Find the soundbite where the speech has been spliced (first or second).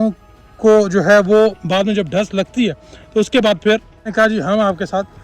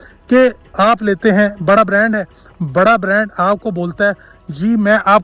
first